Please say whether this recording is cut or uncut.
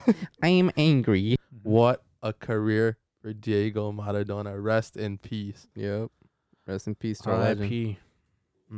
cut